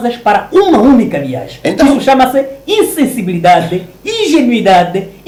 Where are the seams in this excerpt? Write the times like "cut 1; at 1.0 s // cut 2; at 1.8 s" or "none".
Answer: none